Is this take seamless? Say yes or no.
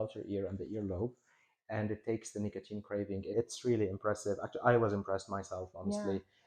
no